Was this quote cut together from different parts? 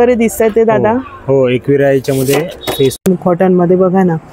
yes; 1 cut; at 3.0 s

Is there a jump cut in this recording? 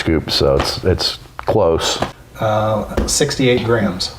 yes; 1 cut; at 2.0 s

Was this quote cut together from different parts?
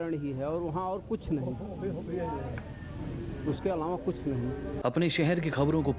no; 0 cuts

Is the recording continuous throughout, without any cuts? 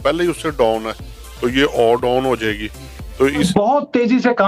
no; 1 cut; at 3.5 s

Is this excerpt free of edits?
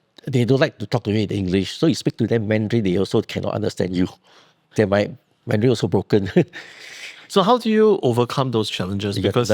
yes; 0 cuts

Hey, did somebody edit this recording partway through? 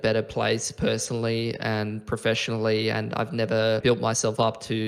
yes; 1 cut; at 3.8 s

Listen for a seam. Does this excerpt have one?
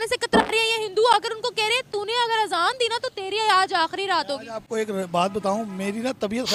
no; 0 cuts

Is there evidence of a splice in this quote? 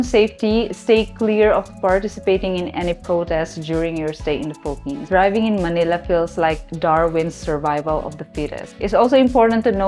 yes; 2 cuts; at 5.0 s, 8.6 s

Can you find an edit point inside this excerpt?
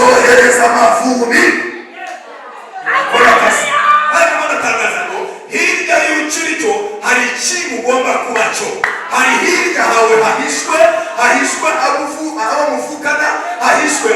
yes; 1 cut; at 4.1 s

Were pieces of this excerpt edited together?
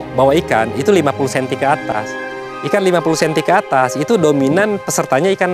no; 0 cuts

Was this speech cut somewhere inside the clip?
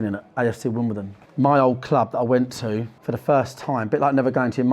yes; 2 cuts; at 1.2 s, 2.9 s

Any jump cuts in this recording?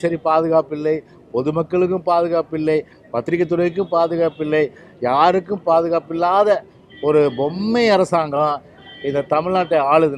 no; 0 cuts

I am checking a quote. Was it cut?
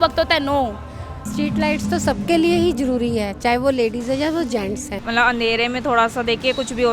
yes; 2 cuts; at 1.2 s, 5.0 s

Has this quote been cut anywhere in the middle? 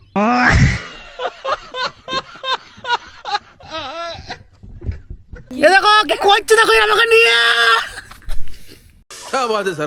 yes; 1 cut; at 5.5 s

